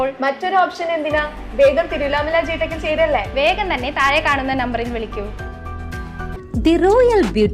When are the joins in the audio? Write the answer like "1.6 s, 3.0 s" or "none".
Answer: 6.4 s